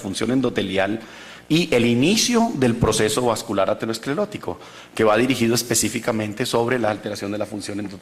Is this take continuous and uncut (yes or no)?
no